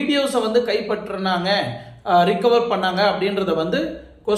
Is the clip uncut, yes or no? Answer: yes